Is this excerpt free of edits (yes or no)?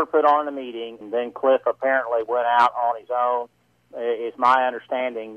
no